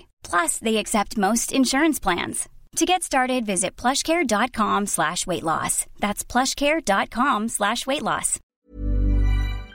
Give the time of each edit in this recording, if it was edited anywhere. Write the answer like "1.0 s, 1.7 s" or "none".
8.4 s

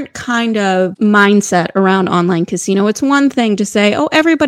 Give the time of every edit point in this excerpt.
0.9 s

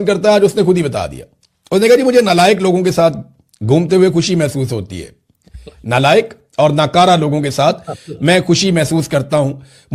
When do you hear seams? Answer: none

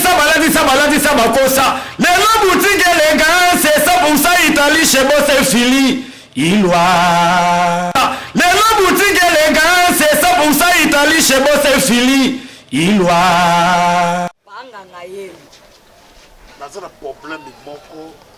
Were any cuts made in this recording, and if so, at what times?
none

